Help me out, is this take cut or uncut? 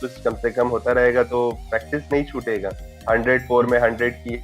cut